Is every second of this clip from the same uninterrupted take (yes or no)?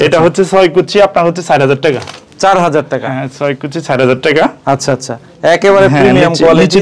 yes